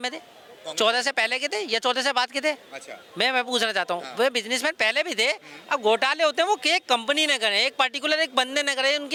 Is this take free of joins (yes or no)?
yes